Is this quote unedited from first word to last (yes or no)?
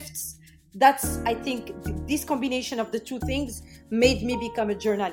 yes